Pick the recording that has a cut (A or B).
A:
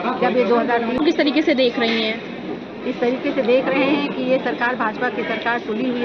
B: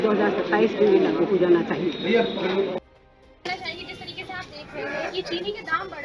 A